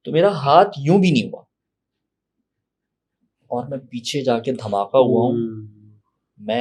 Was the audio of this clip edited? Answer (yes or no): no